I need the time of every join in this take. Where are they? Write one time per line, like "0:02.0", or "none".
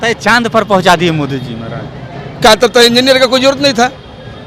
none